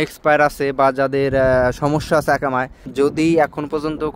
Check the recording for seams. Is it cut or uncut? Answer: cut